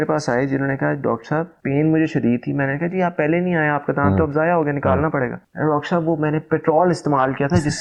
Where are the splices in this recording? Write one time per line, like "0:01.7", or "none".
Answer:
none